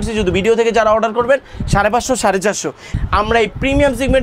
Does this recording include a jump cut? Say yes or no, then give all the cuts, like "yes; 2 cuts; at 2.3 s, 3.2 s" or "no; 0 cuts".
yes; 1 cut; at 2.9 s